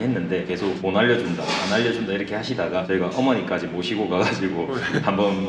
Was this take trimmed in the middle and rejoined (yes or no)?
no